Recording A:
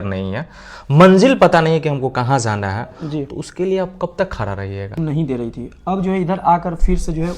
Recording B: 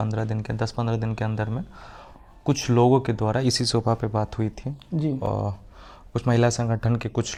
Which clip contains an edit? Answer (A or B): A